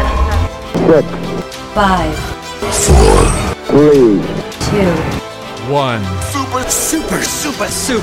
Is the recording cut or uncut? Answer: uncut